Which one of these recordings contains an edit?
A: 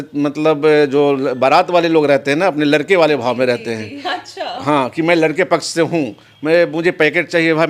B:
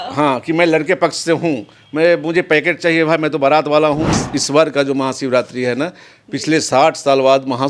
B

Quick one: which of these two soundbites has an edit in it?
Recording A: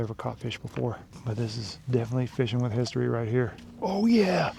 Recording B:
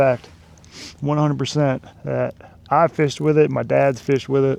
A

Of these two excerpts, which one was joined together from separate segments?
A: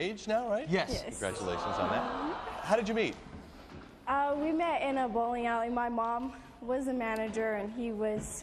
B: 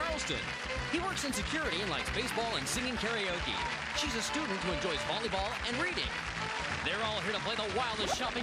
A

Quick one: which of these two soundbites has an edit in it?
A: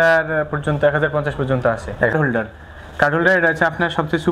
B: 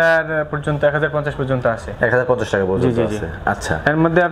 A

